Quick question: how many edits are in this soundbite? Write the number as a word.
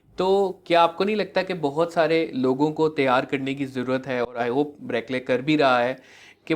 zero